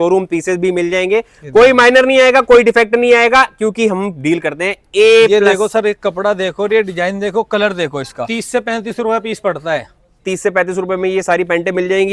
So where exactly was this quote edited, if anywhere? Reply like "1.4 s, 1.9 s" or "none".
8.2 s